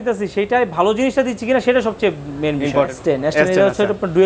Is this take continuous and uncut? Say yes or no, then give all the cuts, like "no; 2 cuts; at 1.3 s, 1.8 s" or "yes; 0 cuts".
no; 1 cut; at 3.0 s